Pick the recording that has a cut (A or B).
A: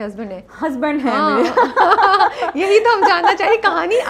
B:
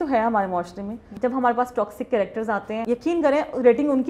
B